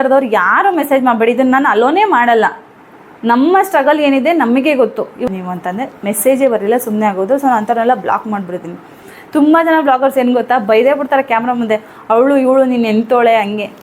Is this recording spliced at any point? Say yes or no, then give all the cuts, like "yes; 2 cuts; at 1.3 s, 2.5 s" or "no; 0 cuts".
yes; 2 cuts; at 5.3 s, 9.1 s